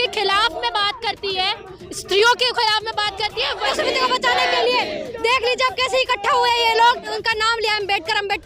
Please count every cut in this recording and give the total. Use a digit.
2